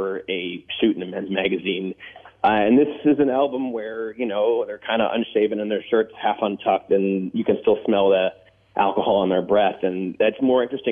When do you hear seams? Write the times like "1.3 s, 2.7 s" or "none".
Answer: none